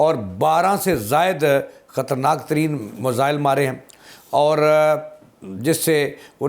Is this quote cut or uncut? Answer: uncut